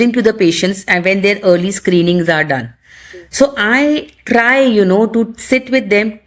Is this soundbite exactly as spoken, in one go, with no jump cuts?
yes; 0 cuts

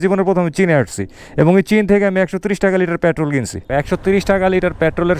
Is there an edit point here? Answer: yes; 1 cut; at 3.7 s

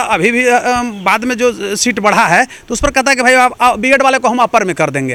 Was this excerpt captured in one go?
yes; 0 cuts

